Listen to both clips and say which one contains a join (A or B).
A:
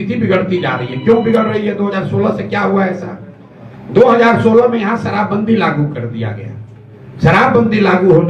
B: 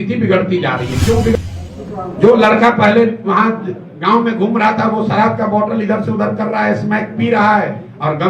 B